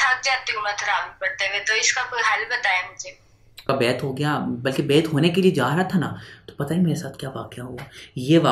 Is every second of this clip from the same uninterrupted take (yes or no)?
no